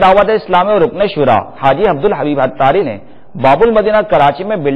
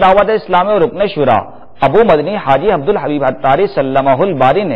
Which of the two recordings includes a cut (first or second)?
first